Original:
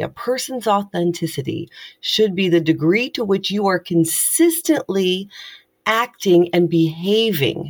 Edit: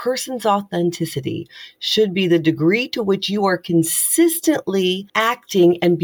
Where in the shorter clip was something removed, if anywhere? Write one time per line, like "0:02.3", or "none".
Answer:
0:05.1